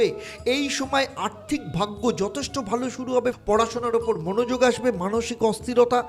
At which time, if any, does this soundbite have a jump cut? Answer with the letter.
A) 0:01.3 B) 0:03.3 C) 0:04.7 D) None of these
B